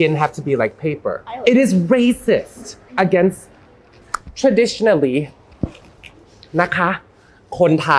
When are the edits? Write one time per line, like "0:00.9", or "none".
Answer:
0:01.3